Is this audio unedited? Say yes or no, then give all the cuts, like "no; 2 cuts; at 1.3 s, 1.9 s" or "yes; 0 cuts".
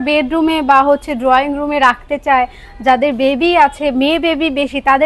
yes; 0 cuts